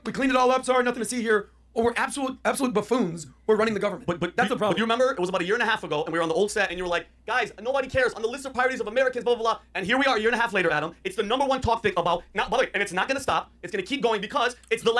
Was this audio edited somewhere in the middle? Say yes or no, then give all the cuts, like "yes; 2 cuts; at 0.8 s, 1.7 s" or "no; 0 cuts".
no; 0 cuts